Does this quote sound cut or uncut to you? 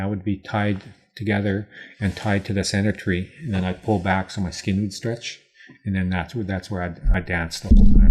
cut